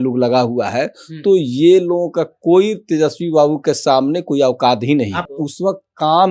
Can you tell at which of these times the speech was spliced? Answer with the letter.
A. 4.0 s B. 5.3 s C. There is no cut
B